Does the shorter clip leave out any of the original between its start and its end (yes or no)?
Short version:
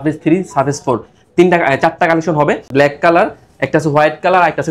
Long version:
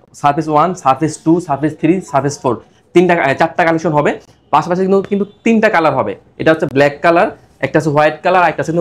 yes